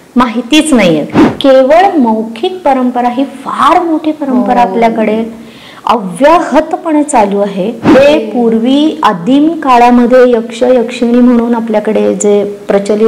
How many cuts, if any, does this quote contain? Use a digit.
2